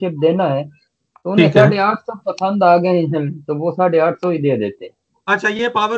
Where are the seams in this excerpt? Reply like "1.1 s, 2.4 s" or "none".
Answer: none